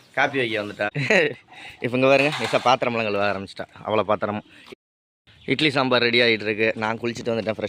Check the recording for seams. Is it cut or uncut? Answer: cut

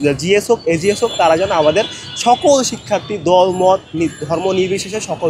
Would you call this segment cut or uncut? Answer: uncut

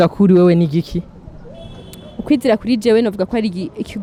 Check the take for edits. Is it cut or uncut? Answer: uncut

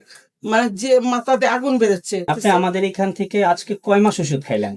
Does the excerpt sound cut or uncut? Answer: cut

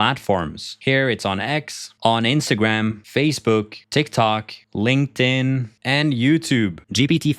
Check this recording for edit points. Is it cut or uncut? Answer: uncut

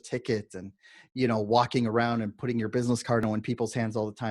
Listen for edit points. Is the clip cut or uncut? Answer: cut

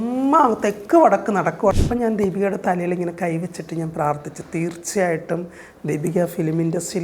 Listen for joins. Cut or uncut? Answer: cut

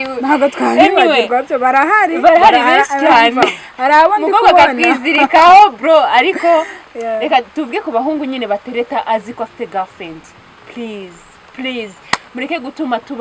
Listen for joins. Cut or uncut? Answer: uncut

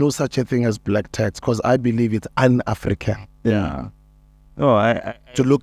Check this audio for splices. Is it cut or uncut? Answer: uncut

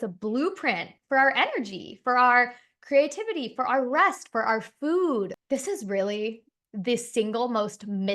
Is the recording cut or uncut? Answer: cut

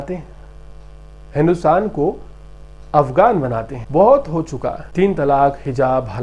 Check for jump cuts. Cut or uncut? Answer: cut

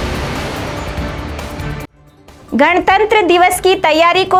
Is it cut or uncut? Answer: uncut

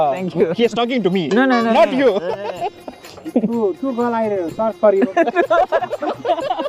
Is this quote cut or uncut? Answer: cut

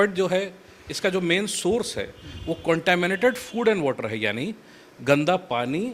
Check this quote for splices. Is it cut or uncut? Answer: uncut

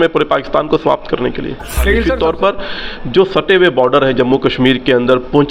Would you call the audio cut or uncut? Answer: cut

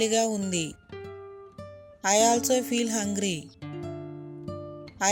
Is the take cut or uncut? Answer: uncut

